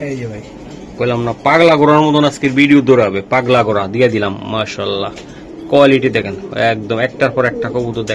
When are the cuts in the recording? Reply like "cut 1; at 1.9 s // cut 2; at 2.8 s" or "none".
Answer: none